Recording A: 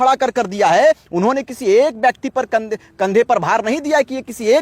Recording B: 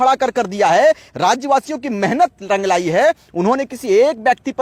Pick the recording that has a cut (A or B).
A